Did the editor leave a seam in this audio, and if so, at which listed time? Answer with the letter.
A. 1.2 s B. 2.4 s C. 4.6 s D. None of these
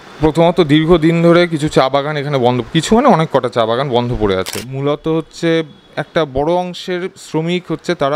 C